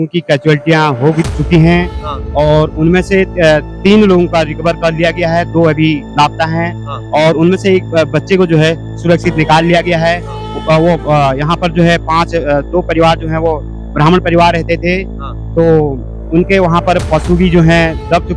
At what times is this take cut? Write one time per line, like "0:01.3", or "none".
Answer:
0:03.7

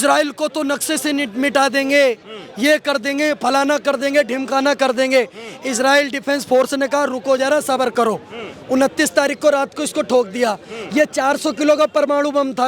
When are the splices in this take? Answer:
none

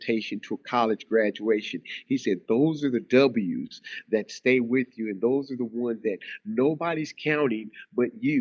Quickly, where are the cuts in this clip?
none

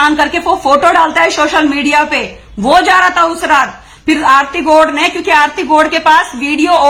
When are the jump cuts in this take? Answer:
none

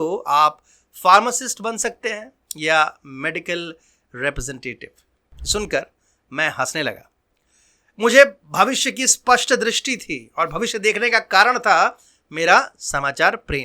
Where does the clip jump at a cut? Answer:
none

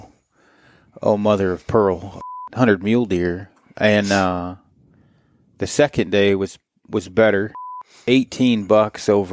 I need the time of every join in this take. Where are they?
0:02.1
0:07.6

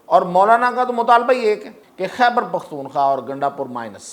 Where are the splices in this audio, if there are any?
0:01.8

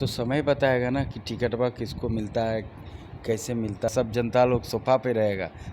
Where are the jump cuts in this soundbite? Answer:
0:03.9

